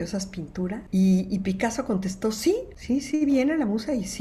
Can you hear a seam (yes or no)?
yes